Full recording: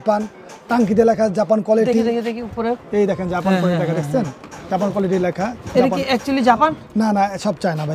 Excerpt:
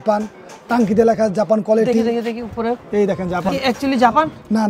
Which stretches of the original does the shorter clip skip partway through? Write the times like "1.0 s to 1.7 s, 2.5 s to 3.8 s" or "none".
3.5 s to 5.9 s